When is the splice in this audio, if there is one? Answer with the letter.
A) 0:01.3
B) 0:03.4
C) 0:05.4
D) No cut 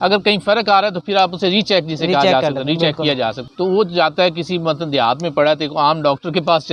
B